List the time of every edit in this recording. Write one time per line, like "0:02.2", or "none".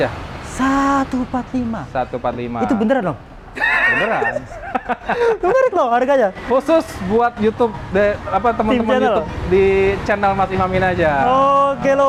none

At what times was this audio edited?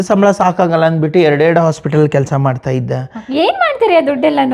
none

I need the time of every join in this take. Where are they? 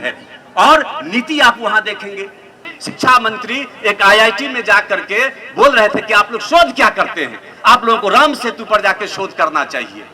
0:02.7

